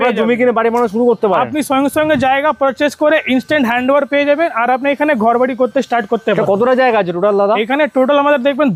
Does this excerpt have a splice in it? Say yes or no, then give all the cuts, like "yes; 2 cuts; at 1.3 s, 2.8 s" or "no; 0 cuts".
no; 0 cuts